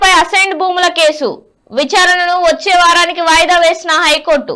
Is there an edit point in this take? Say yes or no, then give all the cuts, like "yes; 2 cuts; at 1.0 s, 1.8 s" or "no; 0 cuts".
no; 0 cuts